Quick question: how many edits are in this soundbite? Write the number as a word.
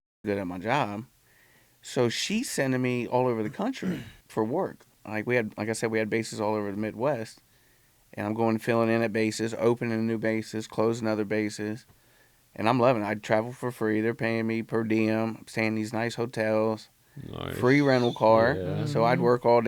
two